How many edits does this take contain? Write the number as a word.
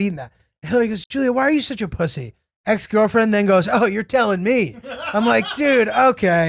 one